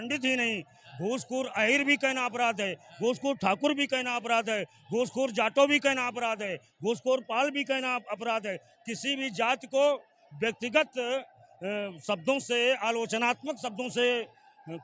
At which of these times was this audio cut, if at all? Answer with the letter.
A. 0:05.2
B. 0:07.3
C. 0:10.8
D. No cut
D